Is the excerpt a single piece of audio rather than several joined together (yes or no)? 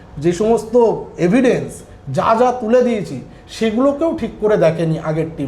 yes